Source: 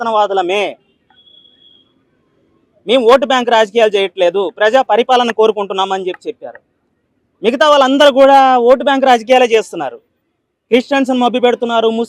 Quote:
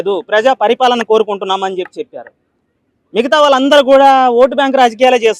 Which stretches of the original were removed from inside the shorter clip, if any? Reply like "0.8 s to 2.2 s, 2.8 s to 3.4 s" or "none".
none